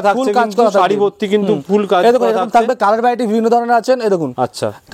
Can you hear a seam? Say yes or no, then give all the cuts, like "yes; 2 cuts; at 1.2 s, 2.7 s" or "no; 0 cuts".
no; 0 cuts